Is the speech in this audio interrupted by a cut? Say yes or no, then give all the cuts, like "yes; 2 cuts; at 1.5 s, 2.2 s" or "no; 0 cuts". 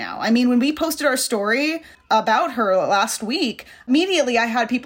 yes; 1 cut; at 3.9 s